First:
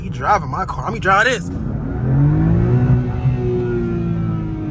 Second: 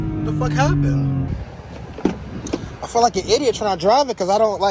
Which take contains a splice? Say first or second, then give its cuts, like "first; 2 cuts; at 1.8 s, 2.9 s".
second; 1 cut; at 1.3 s